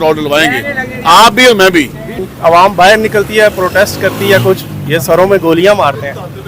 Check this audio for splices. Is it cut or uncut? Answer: cut